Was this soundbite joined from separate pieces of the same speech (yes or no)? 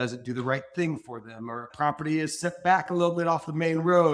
yes